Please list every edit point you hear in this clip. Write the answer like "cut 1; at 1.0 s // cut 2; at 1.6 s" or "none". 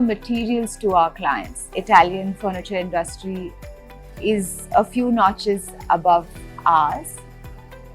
cut 1; at 1.7 s